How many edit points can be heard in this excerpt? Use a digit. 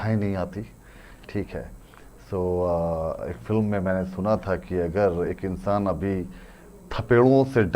0